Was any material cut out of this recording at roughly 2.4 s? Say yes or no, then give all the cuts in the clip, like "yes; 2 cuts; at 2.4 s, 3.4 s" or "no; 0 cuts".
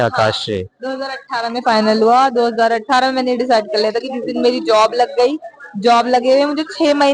no; 0 cuts